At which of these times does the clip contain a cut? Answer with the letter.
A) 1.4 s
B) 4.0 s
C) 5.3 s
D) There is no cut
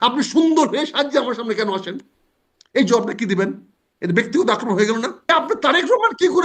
C